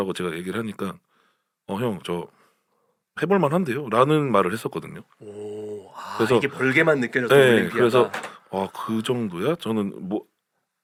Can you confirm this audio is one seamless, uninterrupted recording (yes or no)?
yes